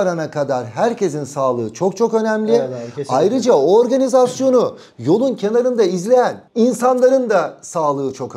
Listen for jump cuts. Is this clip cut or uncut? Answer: uncut